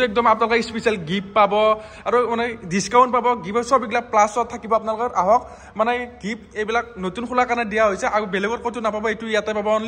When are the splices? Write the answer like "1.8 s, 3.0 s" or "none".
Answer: none